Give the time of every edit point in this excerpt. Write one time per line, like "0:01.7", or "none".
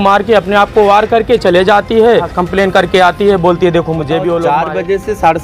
0:02.4
0:04.5